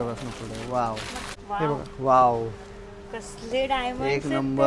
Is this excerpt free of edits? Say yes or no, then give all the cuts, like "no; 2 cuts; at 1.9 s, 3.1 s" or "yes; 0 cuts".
no; 1 cut; at 1.2 s